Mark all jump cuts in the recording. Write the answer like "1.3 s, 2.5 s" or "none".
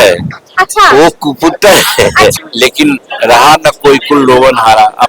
2.4 s